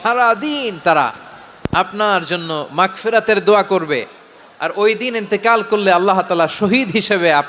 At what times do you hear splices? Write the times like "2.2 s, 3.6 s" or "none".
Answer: none